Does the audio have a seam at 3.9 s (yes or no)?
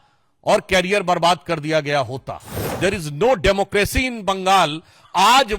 no